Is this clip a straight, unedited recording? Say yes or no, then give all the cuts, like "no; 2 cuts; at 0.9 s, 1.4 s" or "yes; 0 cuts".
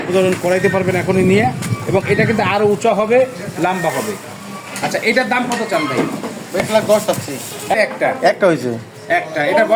no; 2 cuts; at 6.6 s, 7.8 s